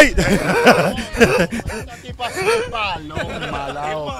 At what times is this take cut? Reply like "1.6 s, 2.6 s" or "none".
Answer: none